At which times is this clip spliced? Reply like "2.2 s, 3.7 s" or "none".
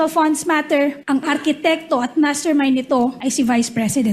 1.0 s, 3.2 s